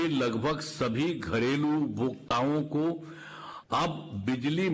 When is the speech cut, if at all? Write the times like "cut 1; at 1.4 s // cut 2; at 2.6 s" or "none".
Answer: none